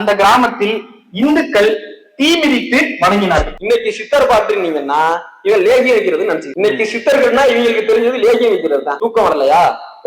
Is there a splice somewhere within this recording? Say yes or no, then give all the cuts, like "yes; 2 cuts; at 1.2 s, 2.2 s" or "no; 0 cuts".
yes; 1 cut; at 3.6 s